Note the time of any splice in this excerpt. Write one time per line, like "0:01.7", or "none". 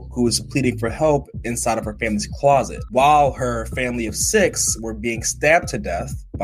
none